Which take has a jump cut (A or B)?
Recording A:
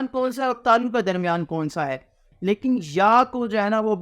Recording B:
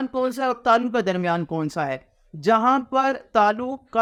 A